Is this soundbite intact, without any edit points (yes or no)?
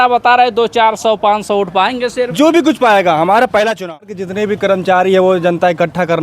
no